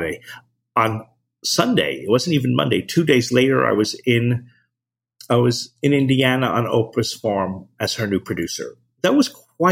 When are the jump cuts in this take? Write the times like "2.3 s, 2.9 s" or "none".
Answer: none